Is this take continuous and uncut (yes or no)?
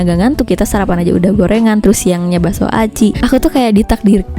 no